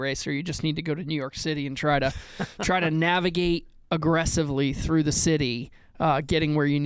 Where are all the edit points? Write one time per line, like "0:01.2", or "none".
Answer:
none